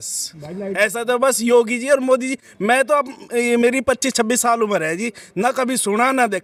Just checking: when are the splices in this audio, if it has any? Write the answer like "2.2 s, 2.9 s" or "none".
none